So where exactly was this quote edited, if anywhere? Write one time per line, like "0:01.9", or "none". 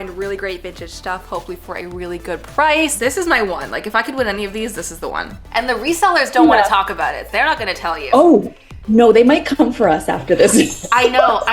0:02.9
0:05.4

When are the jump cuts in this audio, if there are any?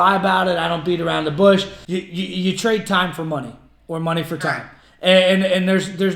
0:01.8

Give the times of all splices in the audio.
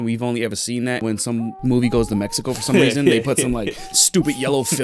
0:01.0

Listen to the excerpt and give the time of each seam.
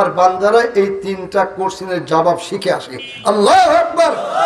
none

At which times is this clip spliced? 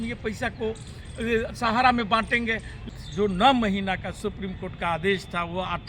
0:02.8

